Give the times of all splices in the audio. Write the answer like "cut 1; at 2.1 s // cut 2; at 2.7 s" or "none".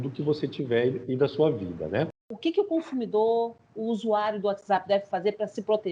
cut 1; at 2.3 s